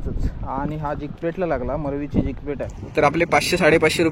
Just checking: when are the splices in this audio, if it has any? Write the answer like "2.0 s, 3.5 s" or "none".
2.8 s

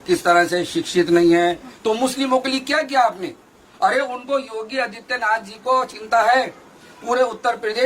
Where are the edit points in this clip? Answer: 1.7 s

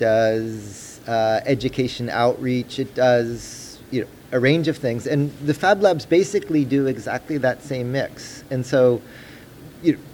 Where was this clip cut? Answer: none

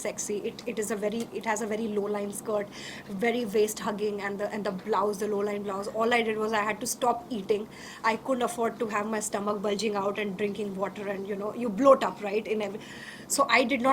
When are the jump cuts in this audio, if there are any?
none

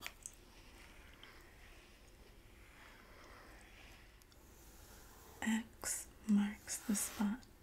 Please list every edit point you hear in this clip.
4.2 s

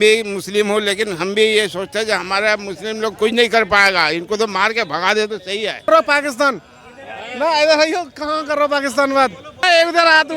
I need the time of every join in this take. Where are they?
5.9 s, 9.6 s

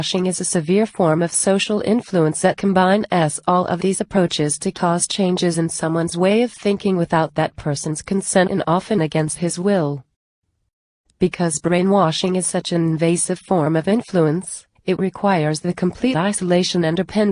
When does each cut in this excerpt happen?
2.4 s

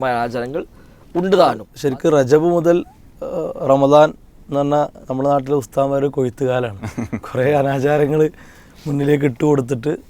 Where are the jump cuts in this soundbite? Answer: 1.7 s

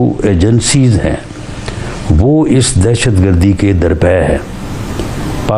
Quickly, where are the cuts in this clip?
none

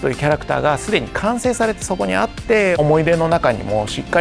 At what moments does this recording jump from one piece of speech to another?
2.8 s

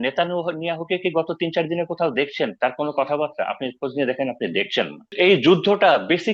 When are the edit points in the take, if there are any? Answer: 5.0 s

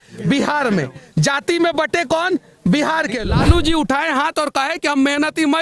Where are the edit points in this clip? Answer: 3.2 s

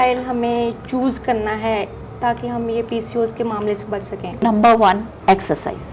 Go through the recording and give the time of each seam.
4.4 s, 5.1 s

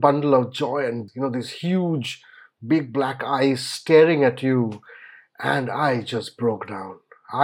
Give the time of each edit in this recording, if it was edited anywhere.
1.1 s

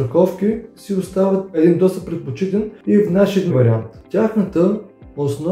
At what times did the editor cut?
1.6 s, 2.7 s, 3.6 s

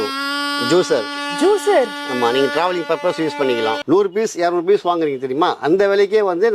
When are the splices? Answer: 3.8 s

